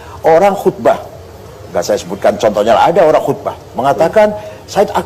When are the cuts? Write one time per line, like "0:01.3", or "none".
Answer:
none